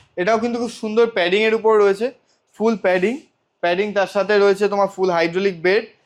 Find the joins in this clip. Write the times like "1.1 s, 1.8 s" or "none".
none